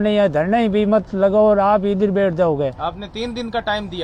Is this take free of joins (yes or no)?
yes